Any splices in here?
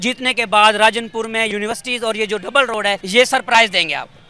yes; 2 cuts; at 1.5 s, 3.0 s

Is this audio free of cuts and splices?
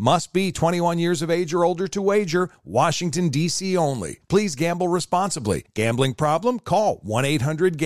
yes; 0 cuts

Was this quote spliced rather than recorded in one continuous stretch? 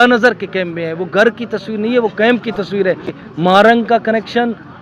yes; 1 cut; at 3.2 s

